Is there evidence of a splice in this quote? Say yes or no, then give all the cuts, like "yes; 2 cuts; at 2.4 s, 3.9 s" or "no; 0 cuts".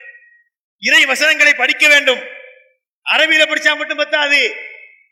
no; 0 cuts